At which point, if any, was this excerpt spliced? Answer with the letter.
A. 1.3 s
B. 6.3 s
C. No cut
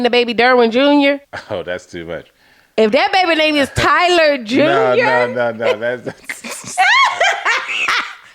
A